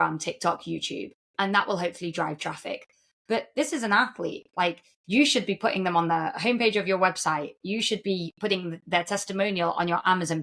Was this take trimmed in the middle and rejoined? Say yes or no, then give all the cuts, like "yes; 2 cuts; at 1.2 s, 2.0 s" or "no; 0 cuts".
no; 0 cuts